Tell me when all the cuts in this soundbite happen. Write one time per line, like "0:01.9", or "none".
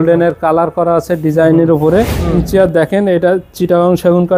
0:02.3